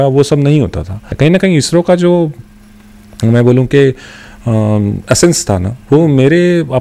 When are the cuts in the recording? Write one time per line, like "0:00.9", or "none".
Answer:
0:01.0